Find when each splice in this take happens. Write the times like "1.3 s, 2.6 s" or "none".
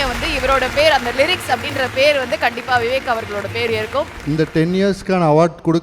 4.1 s